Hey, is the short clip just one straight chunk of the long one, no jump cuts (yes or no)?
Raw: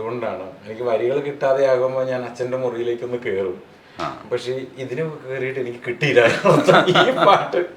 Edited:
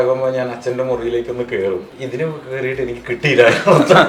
no